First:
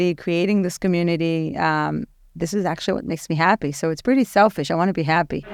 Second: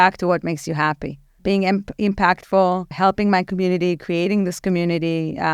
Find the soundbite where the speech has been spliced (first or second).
second